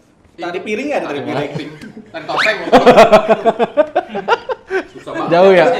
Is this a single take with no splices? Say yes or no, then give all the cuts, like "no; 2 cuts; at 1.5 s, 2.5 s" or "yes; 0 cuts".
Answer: yes; 0 cuts